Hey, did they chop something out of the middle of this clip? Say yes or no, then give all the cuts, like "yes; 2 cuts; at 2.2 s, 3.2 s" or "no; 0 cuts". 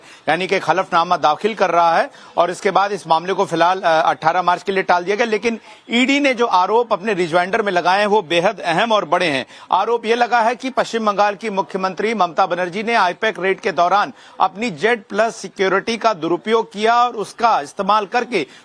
no; 0 cuts